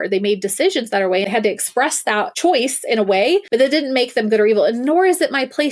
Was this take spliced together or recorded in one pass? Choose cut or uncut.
cut